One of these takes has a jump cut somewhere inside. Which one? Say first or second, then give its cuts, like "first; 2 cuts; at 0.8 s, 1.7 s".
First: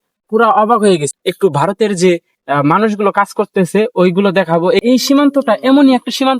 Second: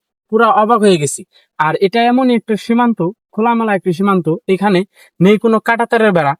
first; 2 cuts; at 1.2 s, 4.8 s